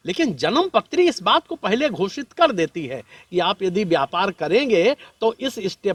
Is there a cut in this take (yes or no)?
no